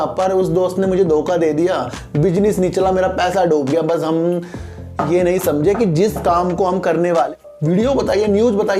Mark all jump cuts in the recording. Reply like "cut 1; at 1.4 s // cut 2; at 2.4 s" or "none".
cut 1; at 7.3 s